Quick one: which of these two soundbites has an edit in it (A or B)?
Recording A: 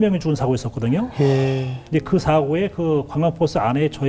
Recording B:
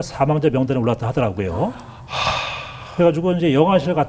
A